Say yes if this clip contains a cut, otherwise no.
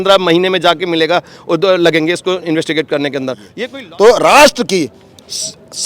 yes